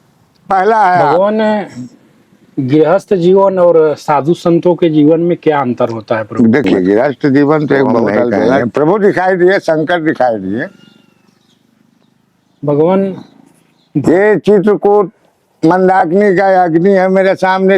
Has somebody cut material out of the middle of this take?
yes; 2 cuts; at 1.1 s, 8.6 s

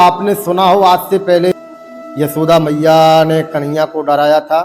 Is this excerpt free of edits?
no; 1 cut; at 1.5 s

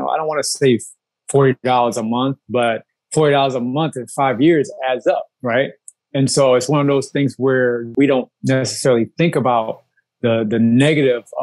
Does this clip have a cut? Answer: yes; 1 cut; at 7.9 s

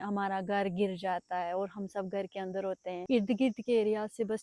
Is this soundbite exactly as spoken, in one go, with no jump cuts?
no; 1 cut; at 3.0 s

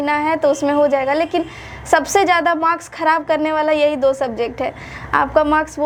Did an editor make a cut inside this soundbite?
no; 0 cuts

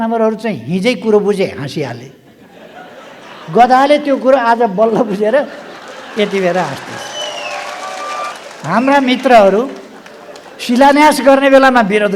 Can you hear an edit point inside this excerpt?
yes; 1 cut; at 8.3 s

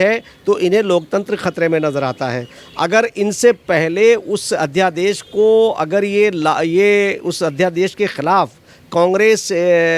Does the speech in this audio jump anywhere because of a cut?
no; 0 cuts

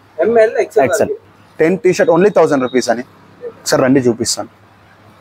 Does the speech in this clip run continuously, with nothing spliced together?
no; 1 cut; at 1.2 s

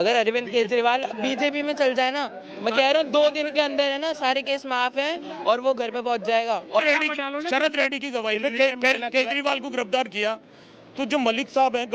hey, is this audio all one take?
no; 1 cut; at 6.8 s

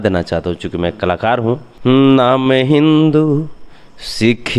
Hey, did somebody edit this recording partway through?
yes; 1 cut; at 1.7 s

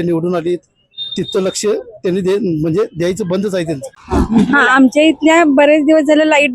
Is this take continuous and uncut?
no; 1 cut; at 3.9 s

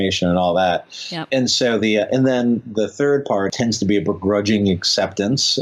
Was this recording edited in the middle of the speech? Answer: yes; 2 cuts; at 1.2 s, 3.5 s

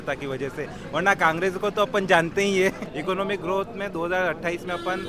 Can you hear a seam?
yes; 1 cut; at 2.9 s

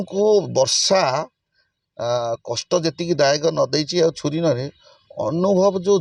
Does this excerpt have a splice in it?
no; 0 cuts

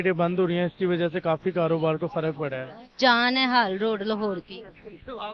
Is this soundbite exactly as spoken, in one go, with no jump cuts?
yes; 0 cuts

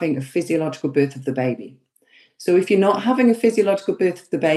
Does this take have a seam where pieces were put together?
no; 0 cuts

